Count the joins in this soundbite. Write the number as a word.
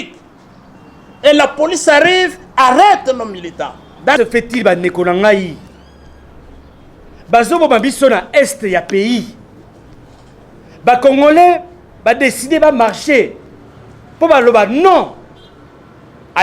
one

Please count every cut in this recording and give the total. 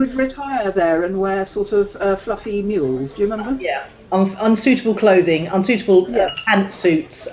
zero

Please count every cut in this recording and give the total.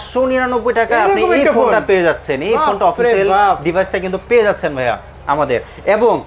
zero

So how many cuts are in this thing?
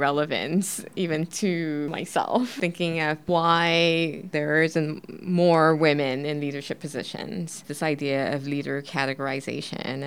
one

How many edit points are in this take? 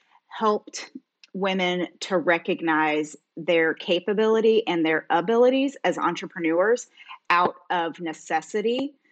zero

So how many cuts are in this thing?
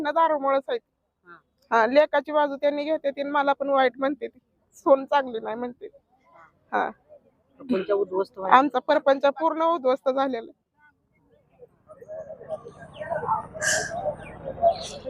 zero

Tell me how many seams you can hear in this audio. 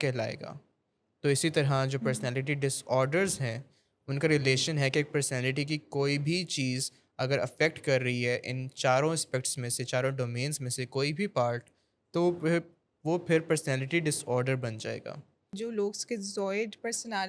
one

